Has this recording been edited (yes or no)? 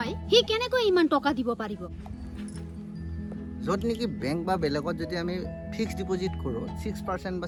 no